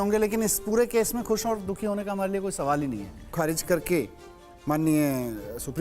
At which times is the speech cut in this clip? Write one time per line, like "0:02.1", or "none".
0:03.3